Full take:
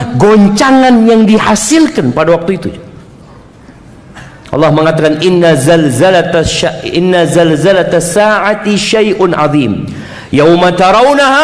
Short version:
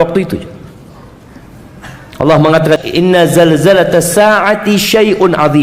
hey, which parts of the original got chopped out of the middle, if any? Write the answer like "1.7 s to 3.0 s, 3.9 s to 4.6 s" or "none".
5.1 s to 6.8 s